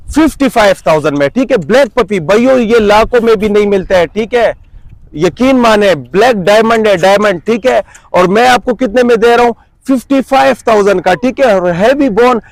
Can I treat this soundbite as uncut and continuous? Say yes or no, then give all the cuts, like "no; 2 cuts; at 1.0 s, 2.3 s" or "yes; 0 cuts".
yes; 0 cuts